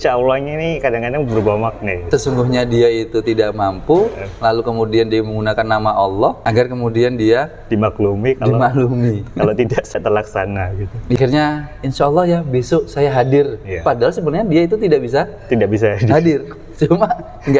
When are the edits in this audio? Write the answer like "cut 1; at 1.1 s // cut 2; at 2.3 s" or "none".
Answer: cut 1; at 2.0 s // cut 2; at 11.2 s